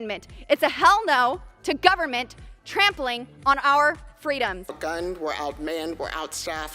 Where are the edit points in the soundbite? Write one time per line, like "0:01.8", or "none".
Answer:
0:04.6